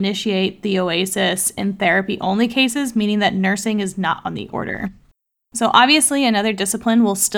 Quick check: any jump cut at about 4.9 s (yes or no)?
no